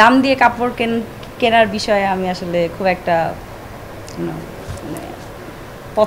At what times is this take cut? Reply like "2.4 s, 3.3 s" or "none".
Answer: none